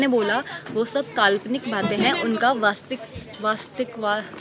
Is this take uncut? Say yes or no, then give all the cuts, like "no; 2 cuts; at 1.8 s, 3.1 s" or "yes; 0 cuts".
yes; 0 cuts